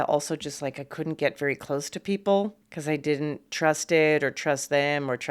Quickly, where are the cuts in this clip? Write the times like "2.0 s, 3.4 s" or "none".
2.7 s